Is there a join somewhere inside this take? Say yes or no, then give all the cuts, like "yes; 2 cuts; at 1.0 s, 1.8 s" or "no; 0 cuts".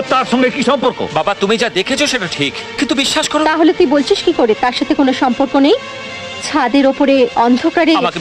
no; 0 cuts